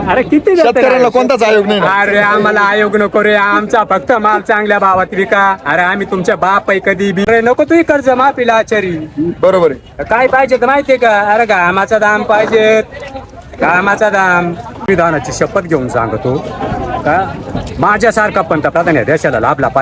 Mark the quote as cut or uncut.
cut